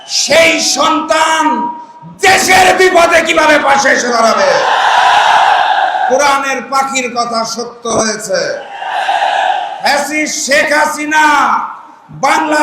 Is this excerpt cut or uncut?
cut